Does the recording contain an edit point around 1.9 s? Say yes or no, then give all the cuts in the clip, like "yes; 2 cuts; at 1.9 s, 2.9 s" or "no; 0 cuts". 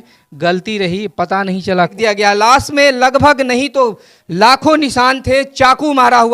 yes; 1 cut; at 1.9 s